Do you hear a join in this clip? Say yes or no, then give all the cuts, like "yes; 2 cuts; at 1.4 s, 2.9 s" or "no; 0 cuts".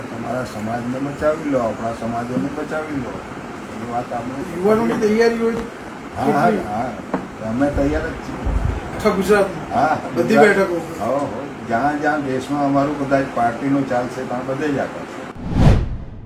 yes; 1 cut; at 15.3 s